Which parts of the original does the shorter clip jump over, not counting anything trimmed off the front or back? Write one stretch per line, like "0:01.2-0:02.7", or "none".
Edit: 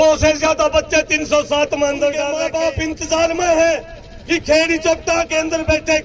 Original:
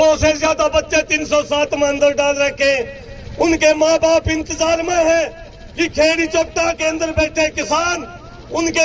0:02.4-0:03.9